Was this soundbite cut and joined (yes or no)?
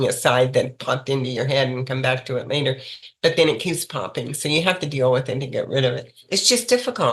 yes